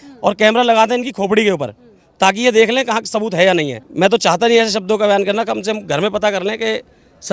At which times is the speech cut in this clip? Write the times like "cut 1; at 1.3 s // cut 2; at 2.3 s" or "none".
cut 1; at 3.8 s